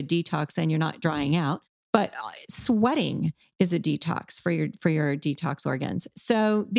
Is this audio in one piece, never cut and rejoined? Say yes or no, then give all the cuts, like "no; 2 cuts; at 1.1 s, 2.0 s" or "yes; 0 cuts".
no; 1 cut; at 1.7 s